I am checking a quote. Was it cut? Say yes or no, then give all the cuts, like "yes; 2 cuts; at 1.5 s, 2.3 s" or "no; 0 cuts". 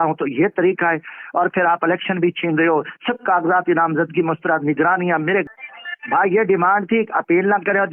no; 0 cuts